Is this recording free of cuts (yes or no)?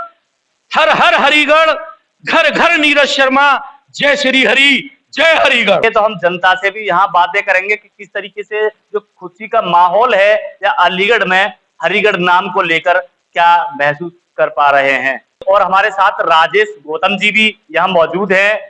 yes